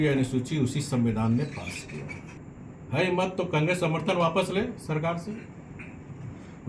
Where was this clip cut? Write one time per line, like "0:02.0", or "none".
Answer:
0:02.3